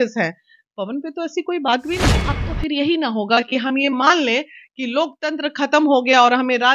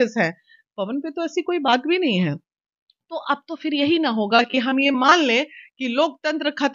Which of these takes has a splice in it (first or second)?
first